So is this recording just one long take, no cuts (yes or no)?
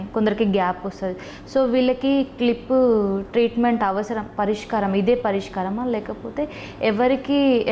yes